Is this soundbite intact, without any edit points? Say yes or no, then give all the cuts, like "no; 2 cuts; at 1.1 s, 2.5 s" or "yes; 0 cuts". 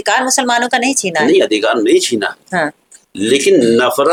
yes; 0 cuts